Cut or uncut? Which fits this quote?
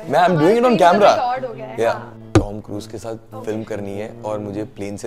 cut